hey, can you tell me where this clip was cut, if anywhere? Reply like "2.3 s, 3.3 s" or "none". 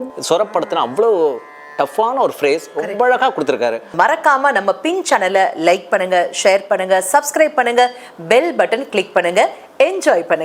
3.8 s